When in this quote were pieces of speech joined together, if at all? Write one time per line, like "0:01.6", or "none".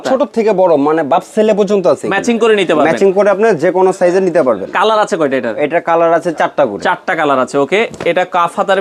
none